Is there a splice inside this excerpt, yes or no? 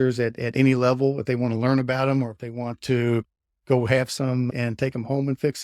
yes